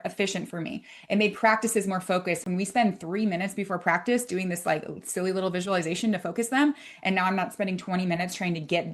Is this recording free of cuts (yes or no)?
yes